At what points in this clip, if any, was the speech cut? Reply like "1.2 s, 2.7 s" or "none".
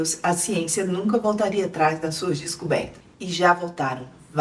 none